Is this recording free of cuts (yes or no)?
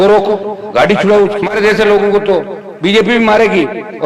no